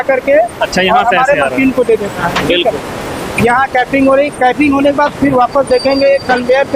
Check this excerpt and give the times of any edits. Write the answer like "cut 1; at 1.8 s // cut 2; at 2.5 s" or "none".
none